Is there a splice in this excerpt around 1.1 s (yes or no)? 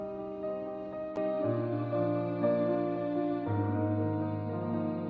yes